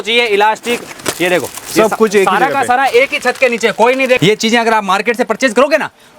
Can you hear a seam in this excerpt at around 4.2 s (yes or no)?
yes